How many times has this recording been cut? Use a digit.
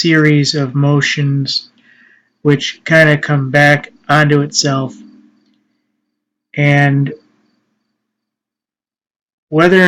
1